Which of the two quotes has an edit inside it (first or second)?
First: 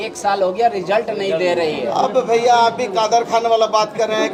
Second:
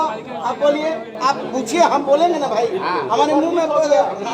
second